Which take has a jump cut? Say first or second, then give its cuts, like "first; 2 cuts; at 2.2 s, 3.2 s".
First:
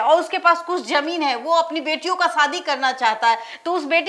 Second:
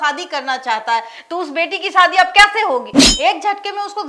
second; 1 cut; at 3.0 s